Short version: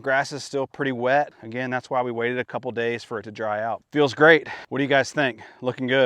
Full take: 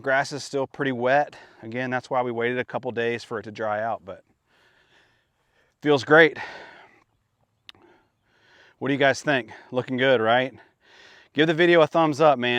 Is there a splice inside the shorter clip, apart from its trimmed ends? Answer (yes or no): yes